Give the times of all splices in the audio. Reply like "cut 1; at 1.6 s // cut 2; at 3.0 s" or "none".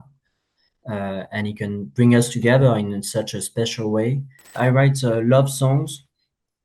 cut 1; at 4.5 s

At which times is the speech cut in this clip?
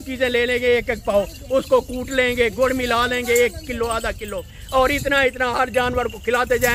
none

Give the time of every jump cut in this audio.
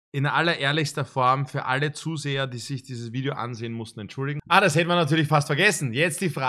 cut 1; at 4.4 s

